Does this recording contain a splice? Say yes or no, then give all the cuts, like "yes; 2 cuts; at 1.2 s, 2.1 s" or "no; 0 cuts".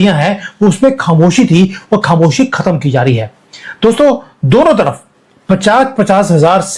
no; 0 cuts